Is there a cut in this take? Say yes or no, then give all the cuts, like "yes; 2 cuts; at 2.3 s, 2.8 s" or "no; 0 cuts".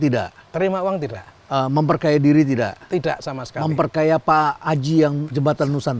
no; 0 cuts